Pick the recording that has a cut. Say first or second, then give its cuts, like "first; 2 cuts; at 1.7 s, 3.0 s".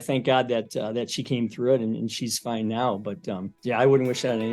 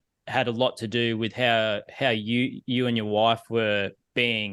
first; 1 cut; at 3.5 s